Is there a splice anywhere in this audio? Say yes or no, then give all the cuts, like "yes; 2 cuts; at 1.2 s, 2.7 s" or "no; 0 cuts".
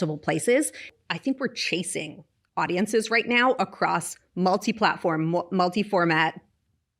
yes; 1 cut; at 0.9 s